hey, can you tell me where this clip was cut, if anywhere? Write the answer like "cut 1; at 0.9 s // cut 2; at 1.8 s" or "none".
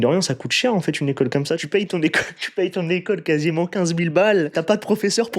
cut 1; at 1.6 s // cut 2; at 4.5 s